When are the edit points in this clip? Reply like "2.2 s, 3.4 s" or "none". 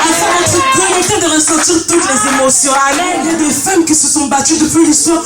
3.2 s